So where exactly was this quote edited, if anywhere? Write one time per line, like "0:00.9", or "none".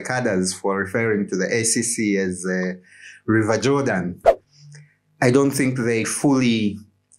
0:04.3